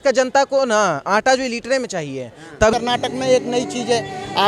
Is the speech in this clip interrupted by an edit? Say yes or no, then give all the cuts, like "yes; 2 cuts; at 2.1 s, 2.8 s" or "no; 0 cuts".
yes; 1 cut; at 2.7 s